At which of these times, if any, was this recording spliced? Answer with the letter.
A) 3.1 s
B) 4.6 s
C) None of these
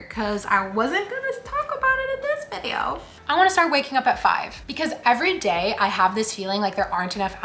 A